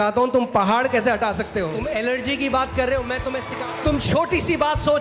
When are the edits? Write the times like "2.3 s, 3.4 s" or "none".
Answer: 1.8 s, 3.4 s